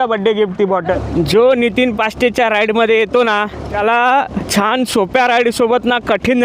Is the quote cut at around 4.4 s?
yes; 3 cuts; at 1.0 s, 3.6 s, 4.4 s

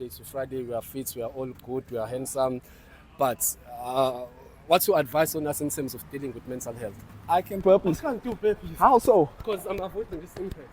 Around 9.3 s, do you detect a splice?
no; 1 cut; at 7.6 s

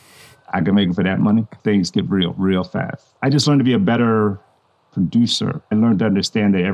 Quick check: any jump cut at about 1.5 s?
yes; 2 cuts; at 1.5 s, 5.7 s

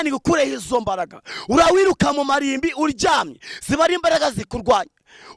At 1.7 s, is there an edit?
yes; 1 cut; at 1.7 s

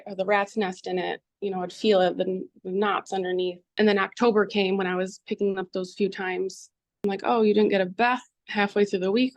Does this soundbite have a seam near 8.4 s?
yes; 2 cuts; at 3.6 s, 8.4 s

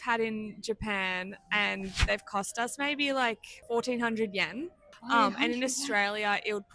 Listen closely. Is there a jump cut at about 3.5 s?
yes; 2 cuts; at 3.5 s, 4.9 s

